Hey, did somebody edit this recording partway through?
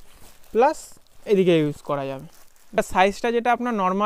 yes; 1 cut; at 2.8 s

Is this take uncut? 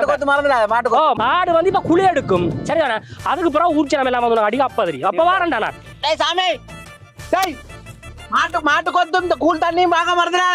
yes; 0 cuts

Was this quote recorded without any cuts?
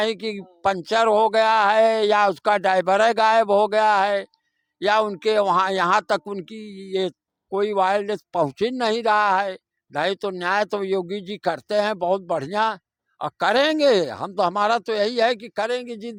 yes; 0 cuts

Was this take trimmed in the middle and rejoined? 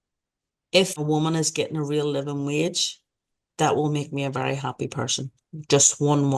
yes; 1 cut; at 1.0 s

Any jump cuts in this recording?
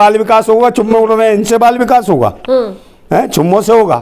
no; 0 cuts

